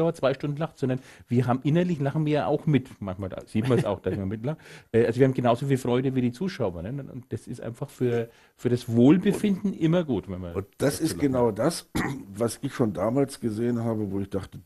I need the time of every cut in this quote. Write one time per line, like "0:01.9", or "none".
none